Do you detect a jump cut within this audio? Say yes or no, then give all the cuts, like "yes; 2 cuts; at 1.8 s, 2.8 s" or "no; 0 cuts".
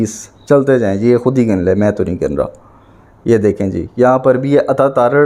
no; 0 cuts